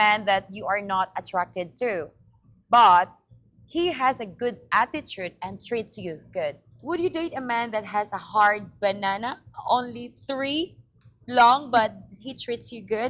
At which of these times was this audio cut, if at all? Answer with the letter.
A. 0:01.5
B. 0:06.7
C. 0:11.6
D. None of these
B